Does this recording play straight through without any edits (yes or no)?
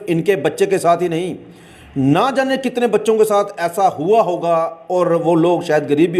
yes